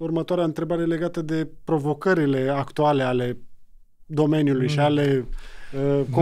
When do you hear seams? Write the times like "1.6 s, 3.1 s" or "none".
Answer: none